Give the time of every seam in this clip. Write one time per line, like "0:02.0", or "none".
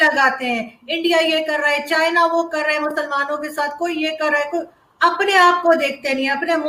none